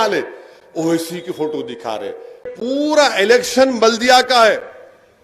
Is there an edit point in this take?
yes; 1 cut; at 2.5 s

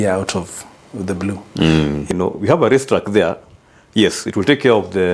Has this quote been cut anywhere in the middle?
yes; 1 cut; at 2.1 s

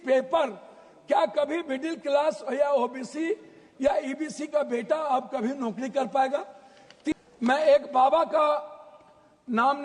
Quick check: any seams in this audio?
yes; 1 cut; at 7.1 s

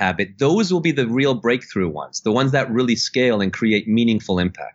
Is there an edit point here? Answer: no; 0 cuts

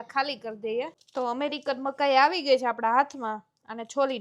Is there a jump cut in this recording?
yes; 1 cut; at 1.0 s

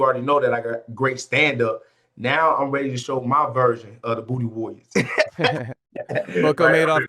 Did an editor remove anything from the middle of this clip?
no; 0 cuts

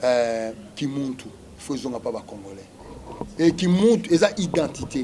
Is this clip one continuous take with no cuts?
yes; 0 cuts

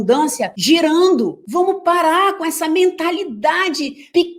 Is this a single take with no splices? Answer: yes; 0 cuts

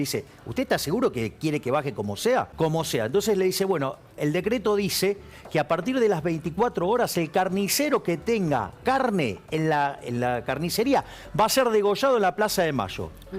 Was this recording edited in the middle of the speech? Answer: yes; 1 cut; at 2.5 s

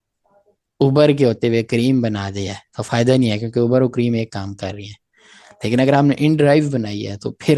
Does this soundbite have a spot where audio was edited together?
no; 0 cuts

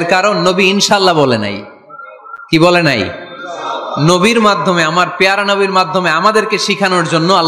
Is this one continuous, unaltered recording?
yes; 0 cuts

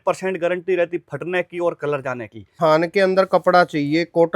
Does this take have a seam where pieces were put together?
yes; 1 cut; at 2.5 s

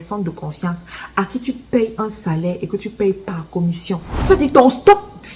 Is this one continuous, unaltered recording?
no; 1 cut; at 4.1 s

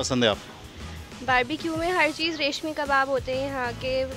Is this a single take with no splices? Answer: yes; 0 cuts

